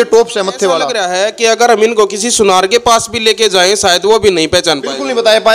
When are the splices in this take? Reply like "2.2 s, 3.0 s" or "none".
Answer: 1.0 s

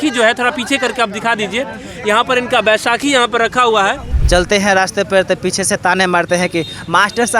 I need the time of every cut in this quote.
4.1 s

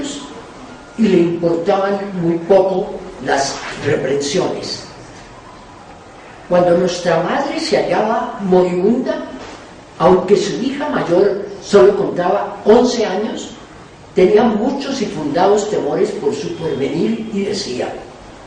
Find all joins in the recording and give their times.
9.7 s

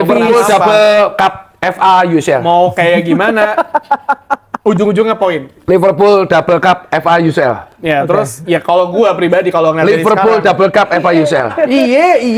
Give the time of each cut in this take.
none

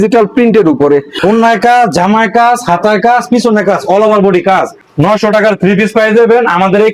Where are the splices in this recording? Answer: 1.1 s, 4.8 s

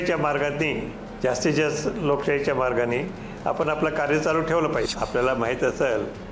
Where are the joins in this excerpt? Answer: 4.9 s

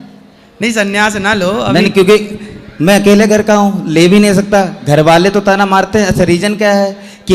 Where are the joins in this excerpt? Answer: none

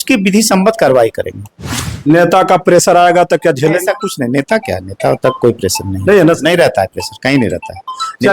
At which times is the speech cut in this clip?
1.7 s

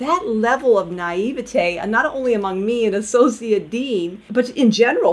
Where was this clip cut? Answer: 4.2 s

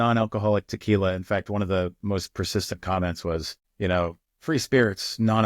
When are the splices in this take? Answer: 3.6 s, 4.3 s

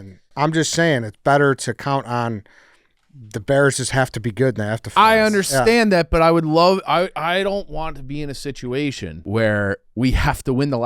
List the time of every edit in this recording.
9.1 s, 9.9 s

